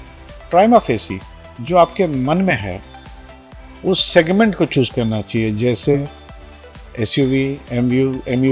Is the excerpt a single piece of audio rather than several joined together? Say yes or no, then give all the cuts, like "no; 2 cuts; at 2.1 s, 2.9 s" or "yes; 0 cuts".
yes; 0 cuts